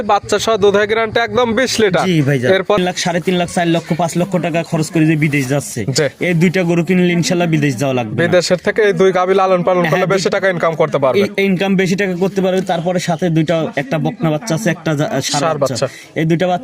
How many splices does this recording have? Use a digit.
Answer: 1